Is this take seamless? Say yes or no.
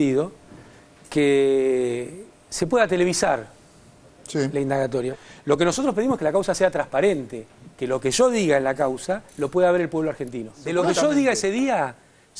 yes